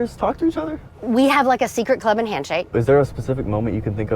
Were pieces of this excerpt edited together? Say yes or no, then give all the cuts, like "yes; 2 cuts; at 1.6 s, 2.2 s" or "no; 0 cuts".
yes; 2 cuts; at 0.9 s, 2.7 s